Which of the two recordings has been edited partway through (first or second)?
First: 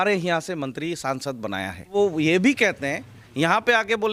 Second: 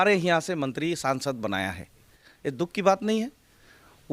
second